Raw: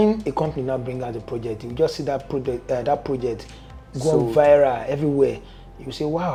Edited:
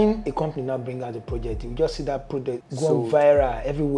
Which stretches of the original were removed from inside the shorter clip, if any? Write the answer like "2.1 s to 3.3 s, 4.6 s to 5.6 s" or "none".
2.6 s to 3.8 s